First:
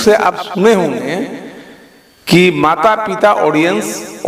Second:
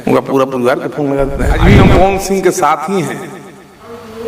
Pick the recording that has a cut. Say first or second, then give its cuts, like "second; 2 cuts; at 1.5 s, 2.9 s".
second; 1 cut; at 1.6 s